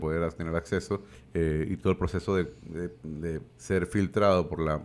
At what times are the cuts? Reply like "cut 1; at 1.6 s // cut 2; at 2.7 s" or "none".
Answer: cut 1; at 1.2 s // cut 2; at 3.1 s